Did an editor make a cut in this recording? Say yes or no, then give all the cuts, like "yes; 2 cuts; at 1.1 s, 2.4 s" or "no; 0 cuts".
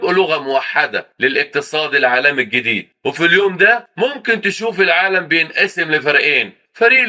no; 0 cuts